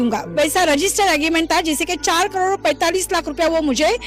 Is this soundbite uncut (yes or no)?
yes